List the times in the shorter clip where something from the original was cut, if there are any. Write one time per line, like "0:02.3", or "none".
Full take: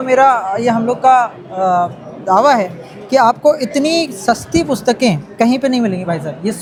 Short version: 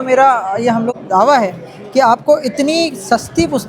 0:00.9